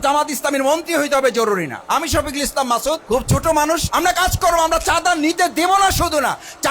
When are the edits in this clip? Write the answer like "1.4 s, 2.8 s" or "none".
3.0 s, 3.9 s